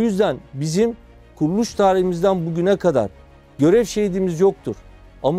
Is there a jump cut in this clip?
no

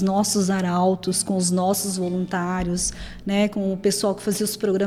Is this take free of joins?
yes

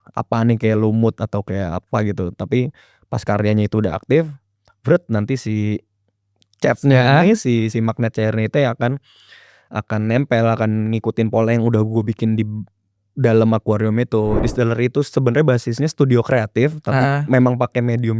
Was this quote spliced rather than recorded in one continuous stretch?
yes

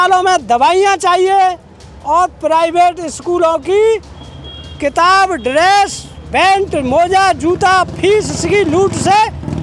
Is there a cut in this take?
no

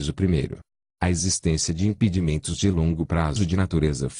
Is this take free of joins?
no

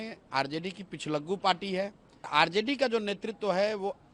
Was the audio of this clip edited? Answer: yes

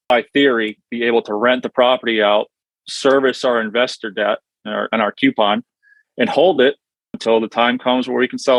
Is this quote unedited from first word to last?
yes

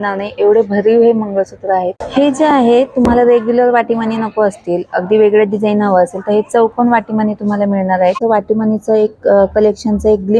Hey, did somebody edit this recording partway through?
yes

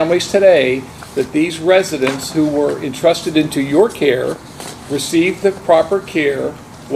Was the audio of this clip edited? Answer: no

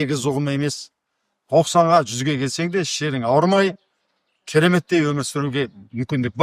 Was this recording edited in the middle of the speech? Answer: no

